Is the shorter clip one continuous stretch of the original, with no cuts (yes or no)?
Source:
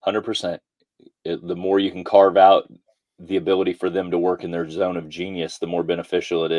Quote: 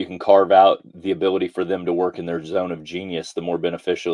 no